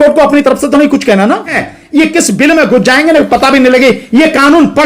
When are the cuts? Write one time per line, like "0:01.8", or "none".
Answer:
0:01.7